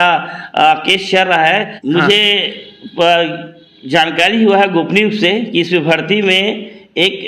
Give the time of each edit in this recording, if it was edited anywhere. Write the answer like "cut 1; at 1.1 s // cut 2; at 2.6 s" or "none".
cut 1; at 1.7 s